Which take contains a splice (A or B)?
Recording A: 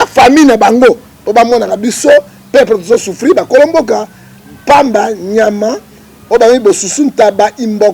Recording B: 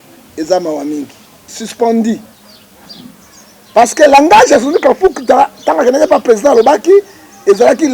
B